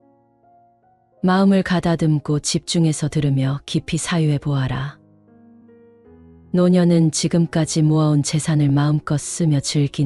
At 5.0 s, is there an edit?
yes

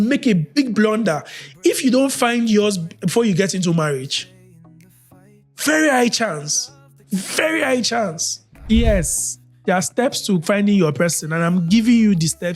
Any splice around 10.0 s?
no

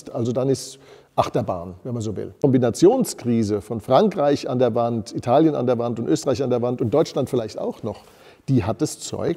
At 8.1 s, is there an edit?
no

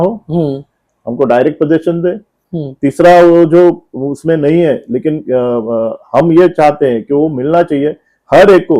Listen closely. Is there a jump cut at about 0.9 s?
no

